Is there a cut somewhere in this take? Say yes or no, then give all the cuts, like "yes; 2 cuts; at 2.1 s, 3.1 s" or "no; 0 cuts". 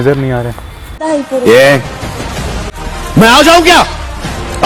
no; 0 cuts